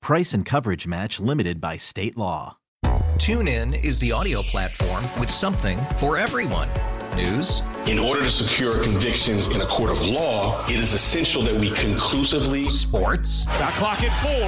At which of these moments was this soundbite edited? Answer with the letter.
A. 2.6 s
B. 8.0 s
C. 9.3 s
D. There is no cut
A